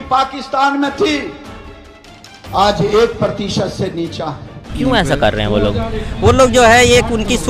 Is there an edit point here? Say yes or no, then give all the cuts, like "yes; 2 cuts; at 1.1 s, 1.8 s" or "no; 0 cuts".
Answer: yes; 1 cut; at 4.7 s